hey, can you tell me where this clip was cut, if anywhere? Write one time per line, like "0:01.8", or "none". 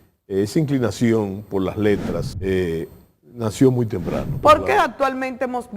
0:02.3
0:04.2